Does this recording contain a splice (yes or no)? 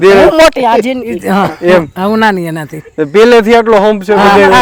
no